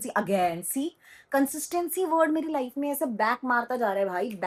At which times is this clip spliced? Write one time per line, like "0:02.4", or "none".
none